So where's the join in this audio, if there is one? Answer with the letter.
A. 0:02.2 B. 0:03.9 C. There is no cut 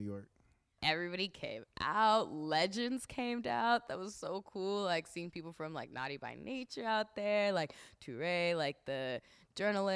B